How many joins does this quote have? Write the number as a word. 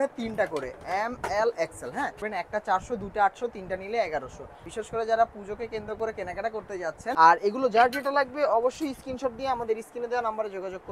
three